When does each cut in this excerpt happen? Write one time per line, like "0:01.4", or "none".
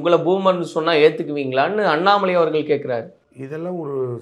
none